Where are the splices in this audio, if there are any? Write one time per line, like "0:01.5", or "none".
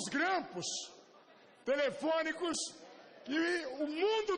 0:01.3